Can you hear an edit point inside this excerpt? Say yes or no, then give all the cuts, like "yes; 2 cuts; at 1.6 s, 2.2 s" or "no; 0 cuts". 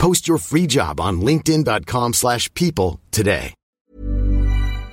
yes; 1 cut; at 3.8 s